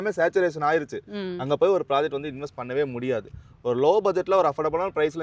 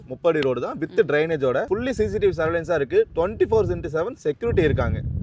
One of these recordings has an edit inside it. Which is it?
second; 1 cut; at 1.7 s

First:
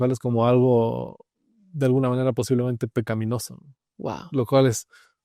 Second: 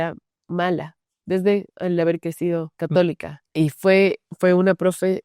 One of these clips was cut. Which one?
second; 2 cuts; at 2.7 s, 3.3 s

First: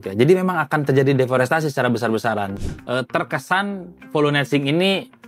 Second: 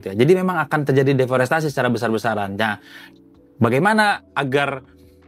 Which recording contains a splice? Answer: first; 1 cut; at 2.5 s

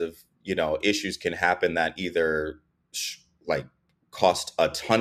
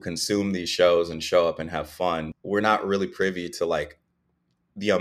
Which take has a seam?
second; 1 cut; at 2.3 s

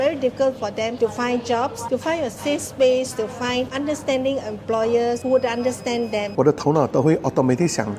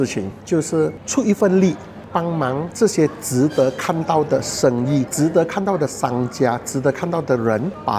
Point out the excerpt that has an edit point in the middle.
first; 4 cuts; at 1.8 s, 3.7 s, 5.2 s, 6.3 s

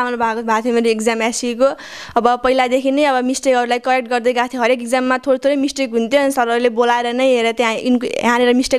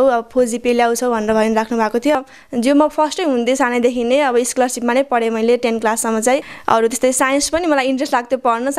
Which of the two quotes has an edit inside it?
second; 2 cuts; at 2.1 s, 6.5 s

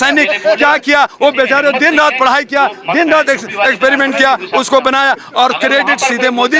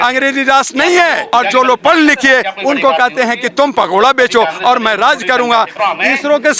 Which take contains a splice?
second; 2 cuts; at 1.2 s, 5.8 s

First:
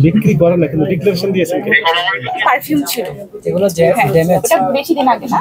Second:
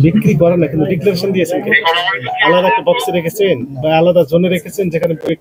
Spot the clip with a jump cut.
first; 1 cut; at 2.4 s

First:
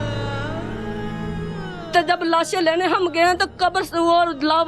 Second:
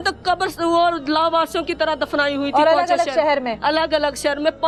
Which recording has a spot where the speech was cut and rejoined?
first; 1 cut; at 1.4 s

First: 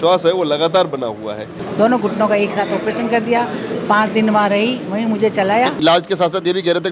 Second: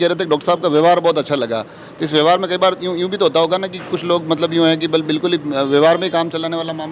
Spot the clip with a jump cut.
first; 2 cuts; at 1.6 s, 5.8 s

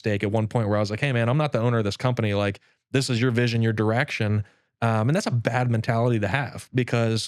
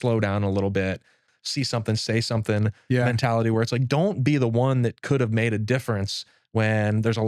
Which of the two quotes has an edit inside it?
second; 1 cut; at 1.3 s

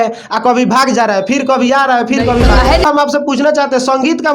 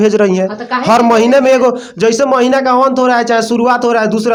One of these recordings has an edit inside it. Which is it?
first; 1 cut; at 2.8 s

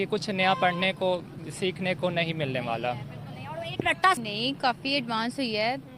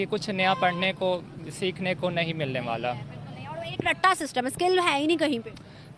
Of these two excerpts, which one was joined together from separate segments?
first; 1 cut; at 4.2 s

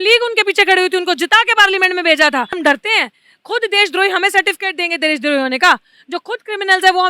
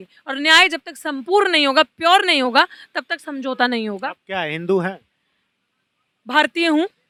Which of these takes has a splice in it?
first; 1 cut; at 2.6 s

